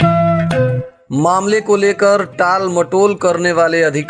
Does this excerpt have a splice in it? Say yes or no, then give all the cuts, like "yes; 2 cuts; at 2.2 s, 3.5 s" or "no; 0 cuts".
yes; 1 cut; at 1.0 s